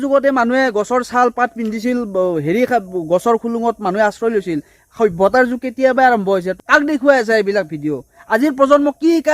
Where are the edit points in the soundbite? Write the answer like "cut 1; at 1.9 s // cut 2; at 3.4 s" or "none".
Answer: cut 1; at 6.5 s